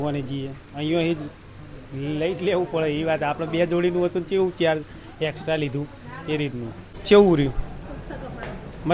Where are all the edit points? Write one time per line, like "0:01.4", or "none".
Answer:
0:07.0